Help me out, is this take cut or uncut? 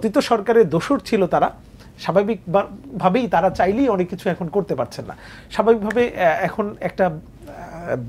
uncut